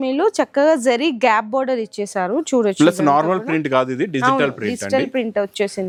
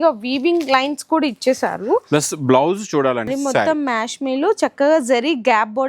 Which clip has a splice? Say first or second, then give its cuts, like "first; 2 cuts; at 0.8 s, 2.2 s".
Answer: second; 1 cut; at 3.3 s